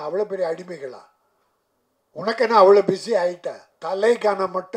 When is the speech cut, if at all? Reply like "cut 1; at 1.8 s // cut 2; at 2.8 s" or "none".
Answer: cut 1; at 3.7 s